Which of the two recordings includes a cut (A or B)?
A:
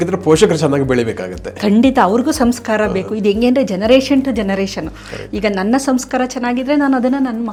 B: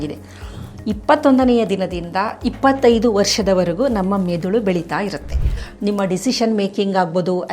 B